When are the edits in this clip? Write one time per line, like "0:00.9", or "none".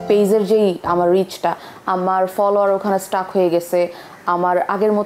none